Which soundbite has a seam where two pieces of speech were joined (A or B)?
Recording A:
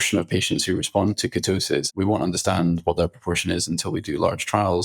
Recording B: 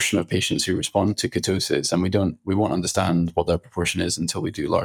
A